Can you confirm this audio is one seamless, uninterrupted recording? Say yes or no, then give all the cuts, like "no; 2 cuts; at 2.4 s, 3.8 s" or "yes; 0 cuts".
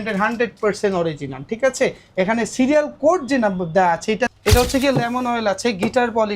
no; 1 cut; at 4.3 s